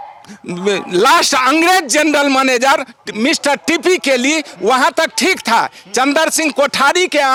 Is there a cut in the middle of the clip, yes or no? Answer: no